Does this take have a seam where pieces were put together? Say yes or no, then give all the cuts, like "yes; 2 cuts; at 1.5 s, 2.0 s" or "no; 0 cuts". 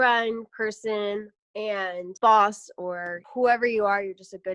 yes; 2 cuts; at 2.1 s, 3.2 s